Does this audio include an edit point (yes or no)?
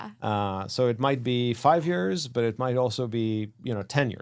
no